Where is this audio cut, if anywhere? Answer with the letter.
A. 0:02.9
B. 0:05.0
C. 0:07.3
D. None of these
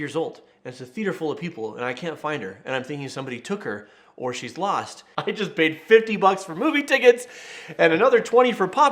B